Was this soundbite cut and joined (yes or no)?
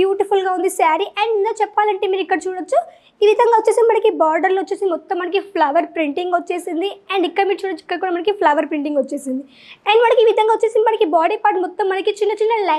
no